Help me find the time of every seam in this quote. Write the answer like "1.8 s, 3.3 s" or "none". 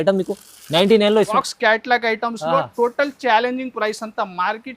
1.3 s